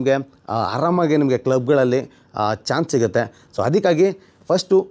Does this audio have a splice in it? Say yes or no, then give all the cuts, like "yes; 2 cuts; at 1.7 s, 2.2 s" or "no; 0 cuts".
no; 0 cuts